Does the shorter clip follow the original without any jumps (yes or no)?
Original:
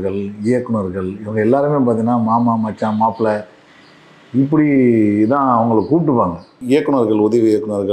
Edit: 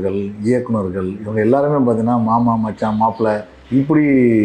no